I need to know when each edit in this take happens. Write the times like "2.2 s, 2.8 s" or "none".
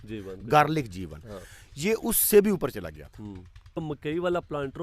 3.8 s